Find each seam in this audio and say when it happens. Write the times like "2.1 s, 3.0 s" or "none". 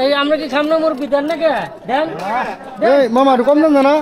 none